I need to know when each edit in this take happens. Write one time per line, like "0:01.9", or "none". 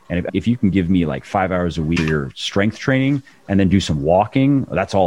0:02.0